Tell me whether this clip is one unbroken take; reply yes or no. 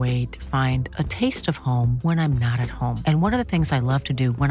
yes